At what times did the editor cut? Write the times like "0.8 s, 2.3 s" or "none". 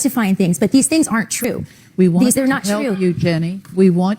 1.5 s